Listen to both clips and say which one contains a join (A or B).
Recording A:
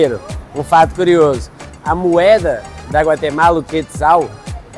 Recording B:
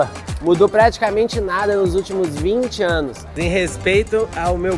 B